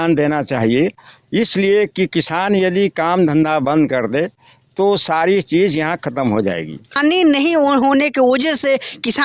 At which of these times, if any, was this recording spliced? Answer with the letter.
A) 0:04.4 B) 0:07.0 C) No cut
B